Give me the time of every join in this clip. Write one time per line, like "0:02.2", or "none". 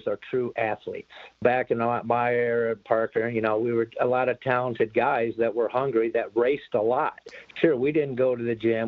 0:01.4